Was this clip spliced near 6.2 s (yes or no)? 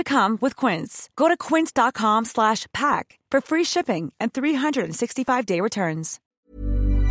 yes